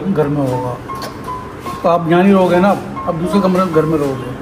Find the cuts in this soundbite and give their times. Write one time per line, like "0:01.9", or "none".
none